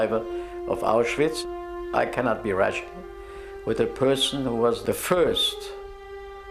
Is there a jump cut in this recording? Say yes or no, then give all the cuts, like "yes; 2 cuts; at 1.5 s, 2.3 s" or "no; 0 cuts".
no; 0 cuts